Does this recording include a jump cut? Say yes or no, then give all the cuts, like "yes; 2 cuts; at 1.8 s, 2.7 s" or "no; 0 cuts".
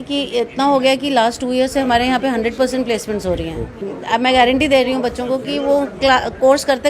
yes; 1 cut; at 3.9 s